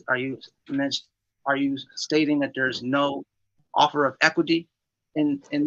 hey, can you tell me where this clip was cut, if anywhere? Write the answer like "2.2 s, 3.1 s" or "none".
none